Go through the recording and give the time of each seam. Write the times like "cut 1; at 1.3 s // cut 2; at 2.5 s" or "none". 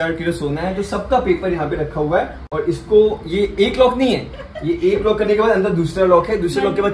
none